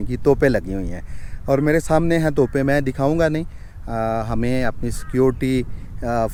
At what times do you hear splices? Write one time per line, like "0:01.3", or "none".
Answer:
none